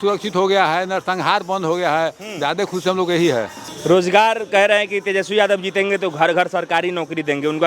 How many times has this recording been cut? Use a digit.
1